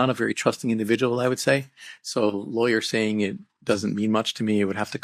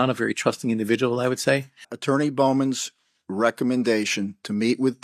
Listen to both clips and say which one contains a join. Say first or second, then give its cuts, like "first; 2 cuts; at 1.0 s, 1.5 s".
second; 1 cut; at 1.9 s